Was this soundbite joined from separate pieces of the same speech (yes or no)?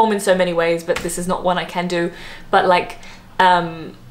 no